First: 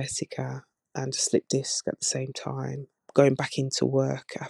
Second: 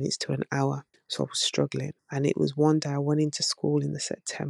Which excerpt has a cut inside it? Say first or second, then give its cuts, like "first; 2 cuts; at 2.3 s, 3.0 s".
second; 2 cuts; at 0.9 s, 2.0 s